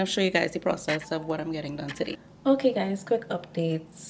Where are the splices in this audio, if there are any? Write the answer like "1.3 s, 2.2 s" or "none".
2.2 s